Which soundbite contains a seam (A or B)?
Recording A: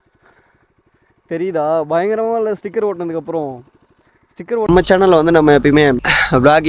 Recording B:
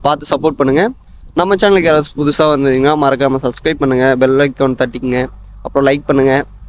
A